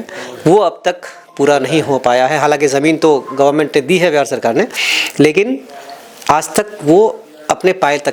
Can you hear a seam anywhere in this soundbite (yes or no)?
no